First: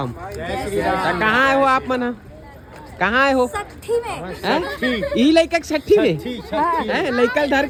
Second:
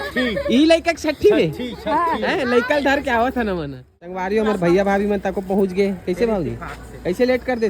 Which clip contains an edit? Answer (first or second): second